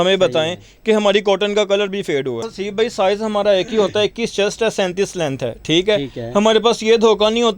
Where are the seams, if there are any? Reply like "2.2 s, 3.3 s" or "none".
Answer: 2.5 s